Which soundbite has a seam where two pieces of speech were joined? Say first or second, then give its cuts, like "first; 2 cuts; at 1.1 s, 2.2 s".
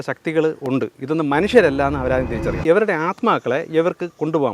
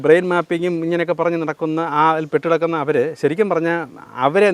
first; 1 cut; at 2.6 s